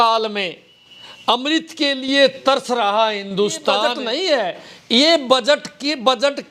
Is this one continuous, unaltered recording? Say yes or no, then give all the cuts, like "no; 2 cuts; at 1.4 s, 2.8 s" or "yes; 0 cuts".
no; 1 cut; at 3.9 s